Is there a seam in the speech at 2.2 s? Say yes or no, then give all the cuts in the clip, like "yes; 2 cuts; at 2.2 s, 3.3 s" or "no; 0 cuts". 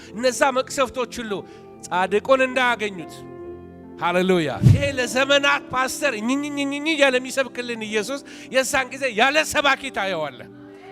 no; 1 cut; at 4.6 s